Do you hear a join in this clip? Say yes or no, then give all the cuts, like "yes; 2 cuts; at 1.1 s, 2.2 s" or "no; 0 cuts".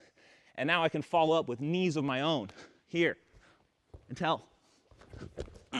no; 0 cuts